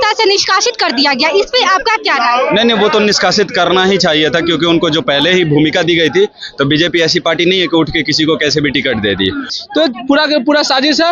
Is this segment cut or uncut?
cut